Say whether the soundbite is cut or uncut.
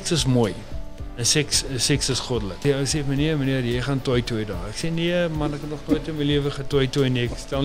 cut